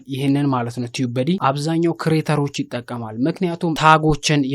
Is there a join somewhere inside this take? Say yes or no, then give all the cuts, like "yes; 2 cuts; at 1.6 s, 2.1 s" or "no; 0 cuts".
yes; 2 cuts; at 1.4 s, 3.8 s